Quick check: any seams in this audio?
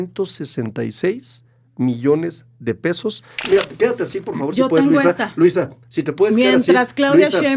yes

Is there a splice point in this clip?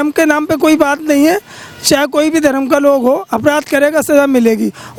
no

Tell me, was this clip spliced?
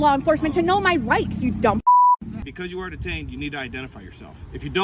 yes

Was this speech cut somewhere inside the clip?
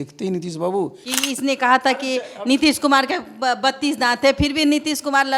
yes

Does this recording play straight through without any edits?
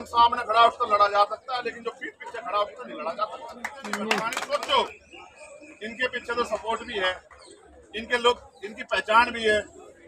no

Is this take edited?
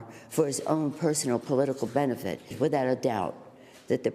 yes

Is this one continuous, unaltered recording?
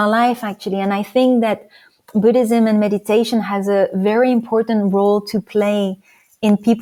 yes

